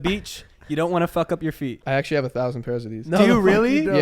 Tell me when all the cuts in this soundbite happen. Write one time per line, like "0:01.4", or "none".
0:01.8

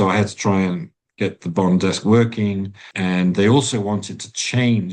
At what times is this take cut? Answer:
0:01.0
0:02.8

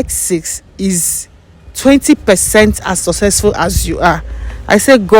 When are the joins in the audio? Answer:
none

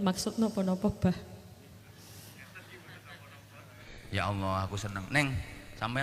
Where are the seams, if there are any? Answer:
0:03.9

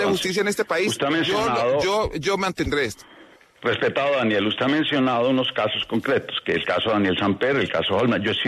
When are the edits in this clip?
none

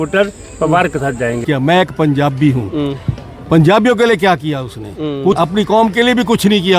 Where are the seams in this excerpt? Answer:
0:01.4
0:05.4

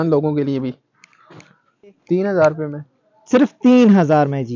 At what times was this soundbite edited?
0:02.0

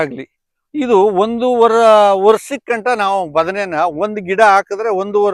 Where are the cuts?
none

